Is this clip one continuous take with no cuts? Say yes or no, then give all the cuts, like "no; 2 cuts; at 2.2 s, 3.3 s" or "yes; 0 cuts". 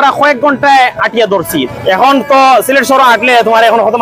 no; 1 cut; at 1.7 s